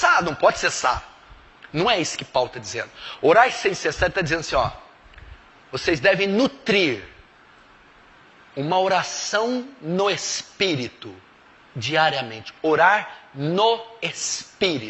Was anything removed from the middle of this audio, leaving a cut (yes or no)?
yes